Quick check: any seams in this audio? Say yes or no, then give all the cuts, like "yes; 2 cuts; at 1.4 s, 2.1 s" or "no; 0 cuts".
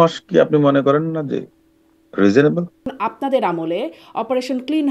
yes; 1 cut; at 2.9 s